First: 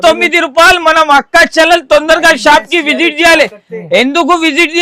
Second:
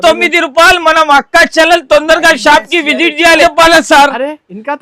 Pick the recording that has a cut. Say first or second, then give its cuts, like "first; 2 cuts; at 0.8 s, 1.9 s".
second; 1 cut; at 3.4 s